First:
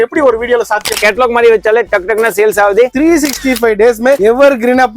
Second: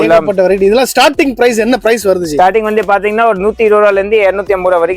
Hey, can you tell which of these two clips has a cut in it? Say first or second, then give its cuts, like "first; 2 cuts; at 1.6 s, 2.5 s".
first; 2 cuts; at 1.0 s, 2.9 s